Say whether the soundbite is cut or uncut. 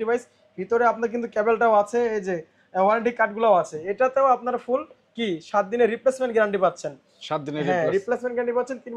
uncut